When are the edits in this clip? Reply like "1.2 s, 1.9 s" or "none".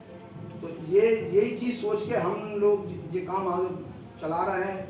none